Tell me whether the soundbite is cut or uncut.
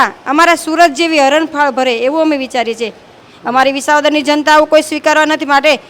cut